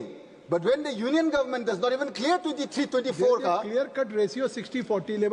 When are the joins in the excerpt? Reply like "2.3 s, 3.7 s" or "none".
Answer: none